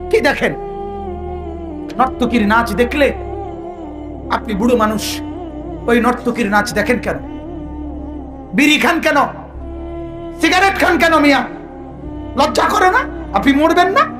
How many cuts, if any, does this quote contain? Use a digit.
2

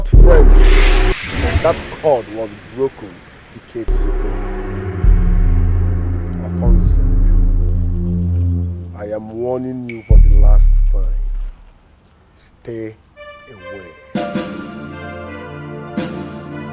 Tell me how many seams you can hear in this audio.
0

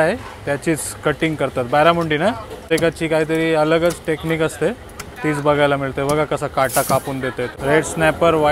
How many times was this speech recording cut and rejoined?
2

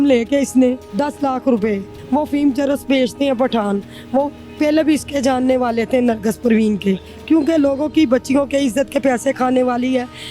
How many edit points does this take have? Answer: 3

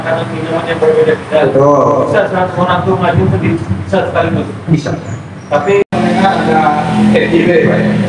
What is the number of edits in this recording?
1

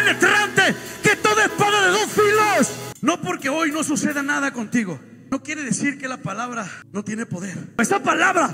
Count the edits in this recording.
4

